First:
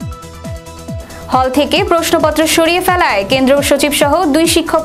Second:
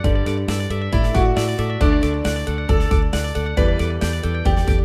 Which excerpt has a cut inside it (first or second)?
first